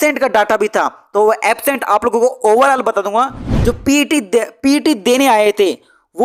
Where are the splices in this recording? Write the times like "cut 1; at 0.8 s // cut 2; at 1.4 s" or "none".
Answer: cut 1; at 3.4 s